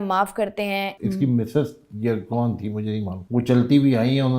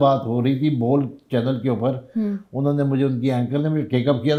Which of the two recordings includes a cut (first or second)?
first